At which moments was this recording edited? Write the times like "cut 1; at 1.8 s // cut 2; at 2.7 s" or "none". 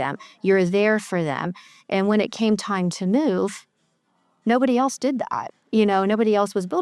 none